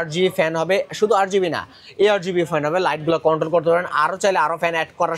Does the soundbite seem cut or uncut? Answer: uncut